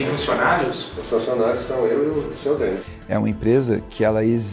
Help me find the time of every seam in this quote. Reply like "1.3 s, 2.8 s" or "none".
2.8 s